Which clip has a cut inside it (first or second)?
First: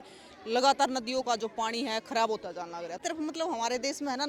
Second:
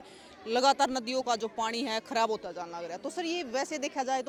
first